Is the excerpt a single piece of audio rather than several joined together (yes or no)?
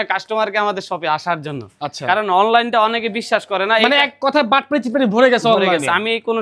yes